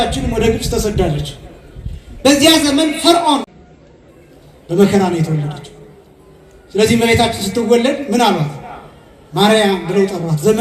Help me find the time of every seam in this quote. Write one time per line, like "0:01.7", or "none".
0:03.5